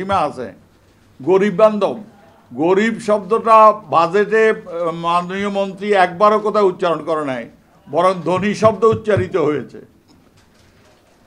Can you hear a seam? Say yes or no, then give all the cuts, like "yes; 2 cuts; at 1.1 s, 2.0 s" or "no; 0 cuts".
no; 0 cuts